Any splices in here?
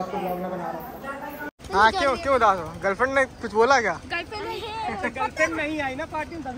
yes; 1 cut; at 1.5 s

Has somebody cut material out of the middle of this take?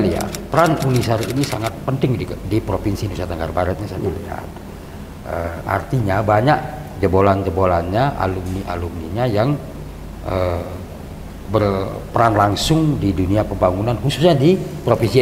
no; 0 cuts

